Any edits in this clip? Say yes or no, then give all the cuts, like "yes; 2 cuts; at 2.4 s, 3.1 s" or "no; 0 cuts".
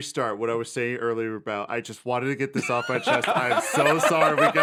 no; 0 cuts